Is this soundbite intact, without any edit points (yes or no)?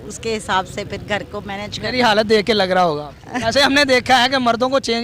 no